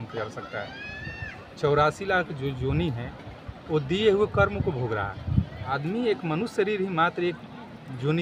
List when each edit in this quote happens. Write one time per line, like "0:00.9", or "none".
0:05.8